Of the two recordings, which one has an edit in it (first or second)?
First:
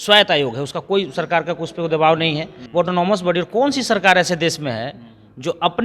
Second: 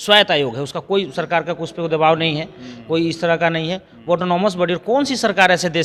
first